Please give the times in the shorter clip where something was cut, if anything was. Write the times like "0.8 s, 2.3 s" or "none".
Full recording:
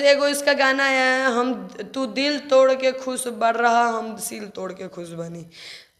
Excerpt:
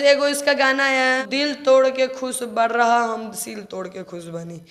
1.2 s